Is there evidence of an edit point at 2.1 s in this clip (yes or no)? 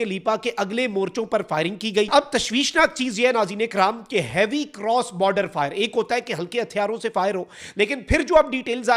yes